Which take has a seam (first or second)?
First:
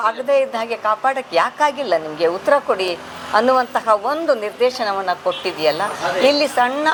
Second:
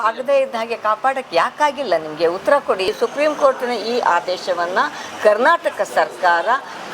second